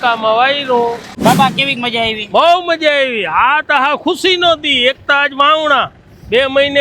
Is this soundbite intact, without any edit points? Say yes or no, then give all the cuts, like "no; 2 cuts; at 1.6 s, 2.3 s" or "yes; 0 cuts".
no; 1 cut; at 1.1 s